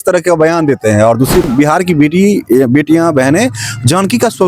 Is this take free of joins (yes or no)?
no